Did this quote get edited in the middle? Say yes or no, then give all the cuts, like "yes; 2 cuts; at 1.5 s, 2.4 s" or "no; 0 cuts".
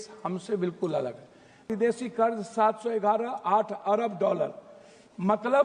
yes; 1 cut; at 1.7 s